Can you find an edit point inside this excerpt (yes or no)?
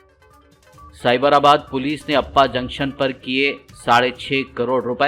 yes